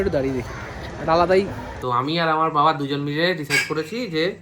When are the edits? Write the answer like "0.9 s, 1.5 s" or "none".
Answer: 1.7 s